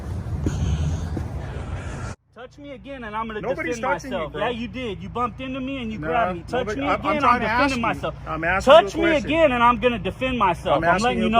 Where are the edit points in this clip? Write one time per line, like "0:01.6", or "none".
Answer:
0:02.1